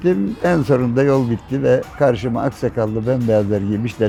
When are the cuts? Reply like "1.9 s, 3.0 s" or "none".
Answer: none

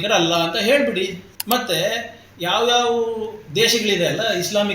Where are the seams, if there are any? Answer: 1.3 s

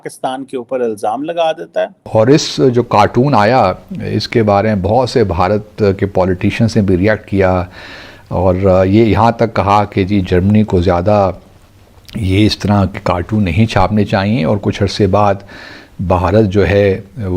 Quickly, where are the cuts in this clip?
2.0 s

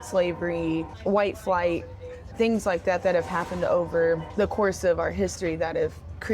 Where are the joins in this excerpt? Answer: 0.9 s, 2.3 s, 4.3 s

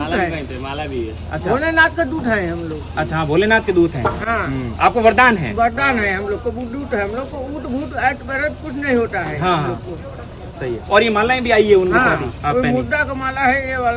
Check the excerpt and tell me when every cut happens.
none

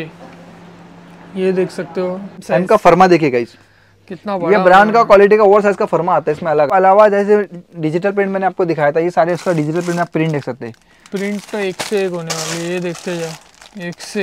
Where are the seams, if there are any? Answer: 2.4 s, 6.7 s

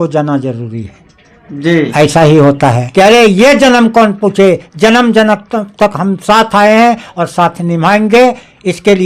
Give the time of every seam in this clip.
2.8 s

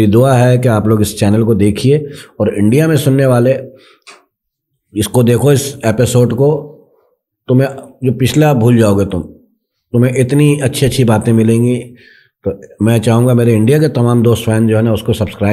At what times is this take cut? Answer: none

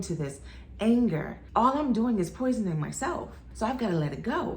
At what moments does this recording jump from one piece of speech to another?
1.3 s

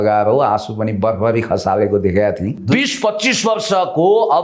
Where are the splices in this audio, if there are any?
2.6 s

